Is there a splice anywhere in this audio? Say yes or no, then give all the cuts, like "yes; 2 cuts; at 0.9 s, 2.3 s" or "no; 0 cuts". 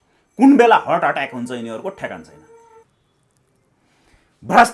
yes; 1 cut; at 2.8 s